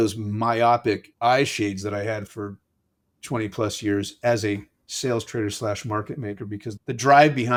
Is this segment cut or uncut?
uncut